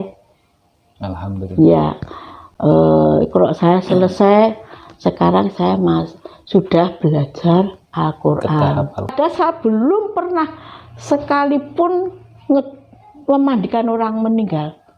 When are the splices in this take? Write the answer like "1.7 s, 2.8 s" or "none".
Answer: 9.1 s